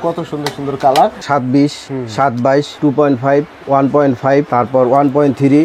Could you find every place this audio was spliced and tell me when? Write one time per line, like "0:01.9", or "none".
0:01.2